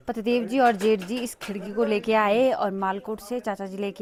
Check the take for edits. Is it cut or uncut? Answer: uncut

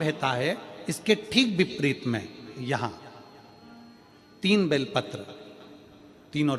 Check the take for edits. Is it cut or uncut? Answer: uncut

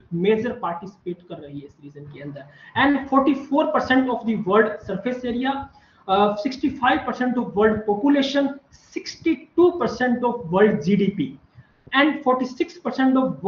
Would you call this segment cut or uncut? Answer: uncut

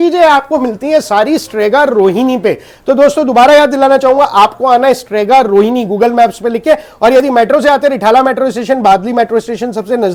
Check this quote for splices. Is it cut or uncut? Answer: uncut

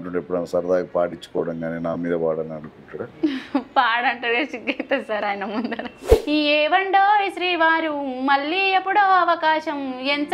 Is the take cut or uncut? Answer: cut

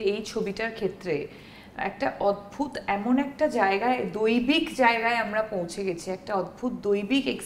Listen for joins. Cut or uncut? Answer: uncut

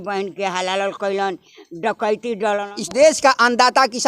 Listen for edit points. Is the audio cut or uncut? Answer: cut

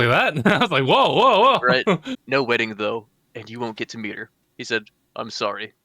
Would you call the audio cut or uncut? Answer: cut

